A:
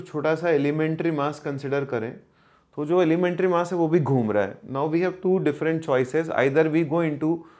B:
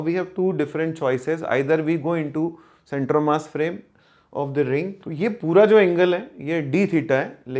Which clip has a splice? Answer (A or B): B